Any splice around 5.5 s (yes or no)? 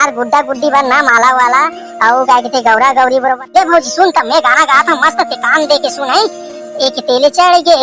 no